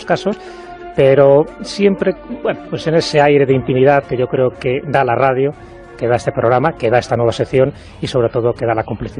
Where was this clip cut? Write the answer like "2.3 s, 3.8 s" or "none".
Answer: 8.0 s